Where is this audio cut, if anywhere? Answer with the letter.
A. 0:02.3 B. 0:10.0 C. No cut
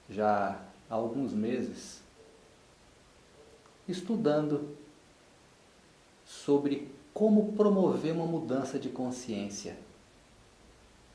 B